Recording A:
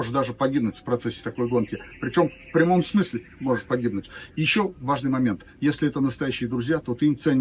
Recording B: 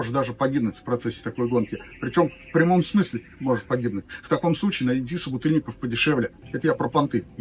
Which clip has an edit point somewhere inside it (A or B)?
B